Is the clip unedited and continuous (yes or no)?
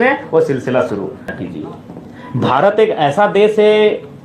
no